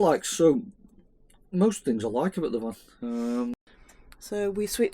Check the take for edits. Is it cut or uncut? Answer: cut